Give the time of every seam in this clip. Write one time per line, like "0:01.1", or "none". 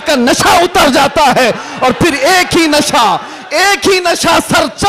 none